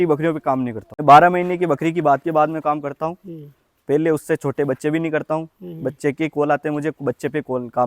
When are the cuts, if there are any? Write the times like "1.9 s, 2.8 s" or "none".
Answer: 1.0 s